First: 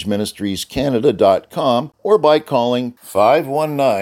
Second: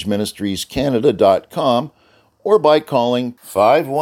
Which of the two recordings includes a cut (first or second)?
first